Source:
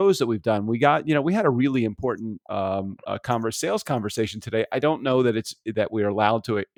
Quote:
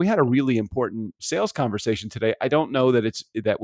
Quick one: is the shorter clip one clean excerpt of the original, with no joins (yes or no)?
no